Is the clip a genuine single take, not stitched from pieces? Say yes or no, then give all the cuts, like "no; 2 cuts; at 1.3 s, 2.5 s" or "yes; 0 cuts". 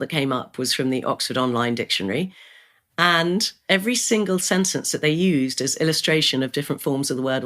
no; 1 cut; at 3.6 s